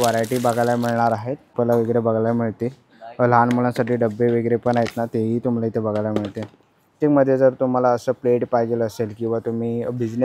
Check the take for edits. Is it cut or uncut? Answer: cut